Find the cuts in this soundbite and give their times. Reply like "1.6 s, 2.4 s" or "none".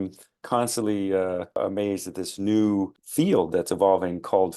1.6 s, 3.0 s